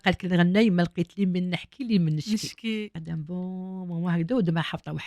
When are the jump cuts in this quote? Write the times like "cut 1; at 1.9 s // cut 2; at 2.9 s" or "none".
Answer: cut 1; at 2.9 s